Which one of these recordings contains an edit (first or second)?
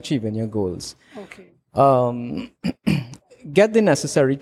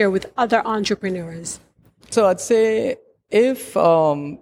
second